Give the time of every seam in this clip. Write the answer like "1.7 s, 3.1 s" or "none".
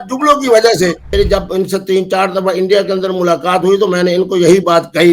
1.1 s